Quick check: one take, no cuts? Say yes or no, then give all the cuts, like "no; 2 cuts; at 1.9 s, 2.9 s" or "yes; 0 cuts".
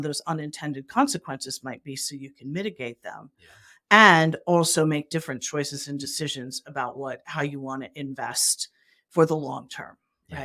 yes; 0 cuts